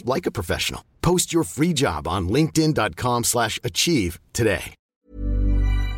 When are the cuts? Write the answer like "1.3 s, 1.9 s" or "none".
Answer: 4.8 s